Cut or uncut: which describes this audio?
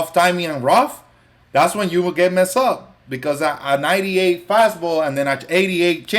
uncut